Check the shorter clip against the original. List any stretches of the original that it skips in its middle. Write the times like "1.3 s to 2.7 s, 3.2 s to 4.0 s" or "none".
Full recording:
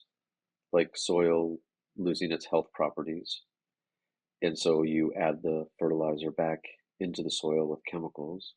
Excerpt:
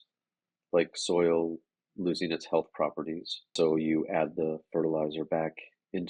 3.5 s to 4.6 s